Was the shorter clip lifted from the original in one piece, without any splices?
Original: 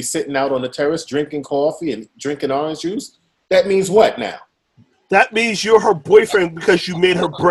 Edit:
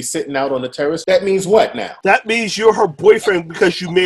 no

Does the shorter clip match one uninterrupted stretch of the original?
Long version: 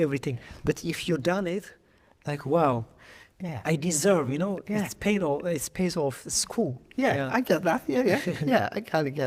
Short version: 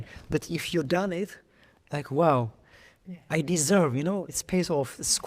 no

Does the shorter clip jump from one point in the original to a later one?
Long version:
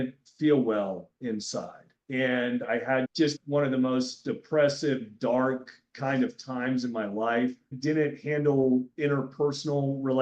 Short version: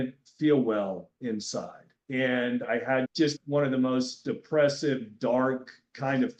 no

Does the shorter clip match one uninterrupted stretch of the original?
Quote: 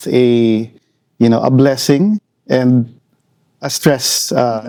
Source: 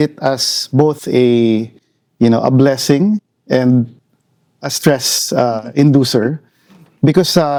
yes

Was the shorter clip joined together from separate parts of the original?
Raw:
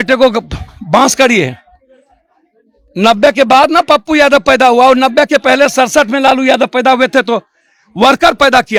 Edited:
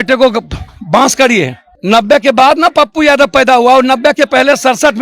yes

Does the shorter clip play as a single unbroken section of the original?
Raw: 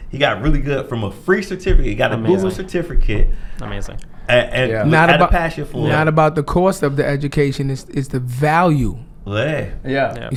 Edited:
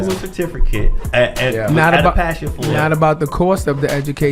no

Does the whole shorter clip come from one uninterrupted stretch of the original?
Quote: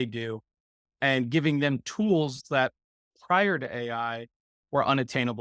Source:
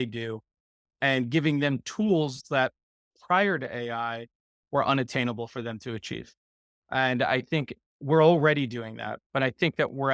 yes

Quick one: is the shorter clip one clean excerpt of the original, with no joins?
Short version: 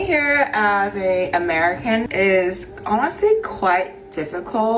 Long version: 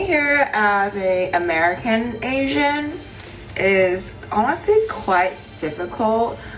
no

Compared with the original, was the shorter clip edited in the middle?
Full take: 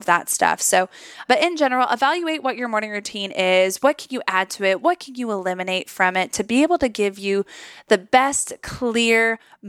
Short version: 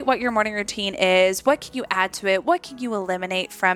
no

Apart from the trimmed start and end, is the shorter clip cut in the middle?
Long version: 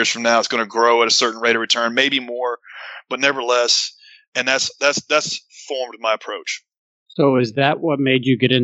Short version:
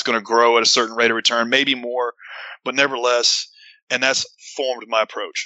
yes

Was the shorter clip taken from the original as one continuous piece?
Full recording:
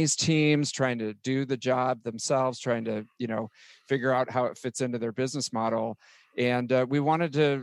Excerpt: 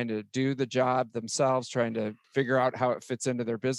no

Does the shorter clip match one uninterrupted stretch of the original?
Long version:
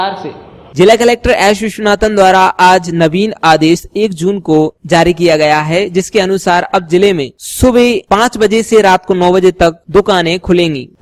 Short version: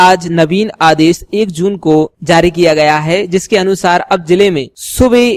yes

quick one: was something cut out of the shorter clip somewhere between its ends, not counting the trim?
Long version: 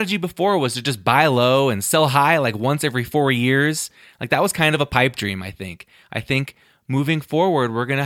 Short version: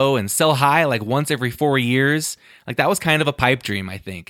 no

